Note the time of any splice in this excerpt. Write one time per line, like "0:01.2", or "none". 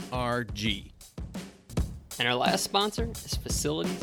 0:01.0